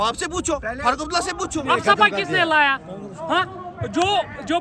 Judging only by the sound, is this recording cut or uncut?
cut